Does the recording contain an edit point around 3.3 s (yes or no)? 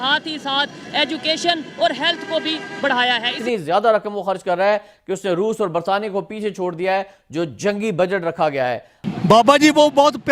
yes